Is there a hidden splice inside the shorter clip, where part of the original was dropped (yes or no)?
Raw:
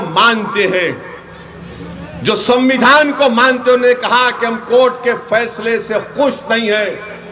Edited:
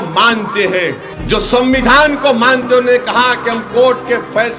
yes